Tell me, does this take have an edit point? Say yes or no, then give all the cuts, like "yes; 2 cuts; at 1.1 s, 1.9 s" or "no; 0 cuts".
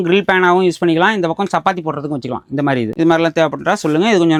no; 0 cuts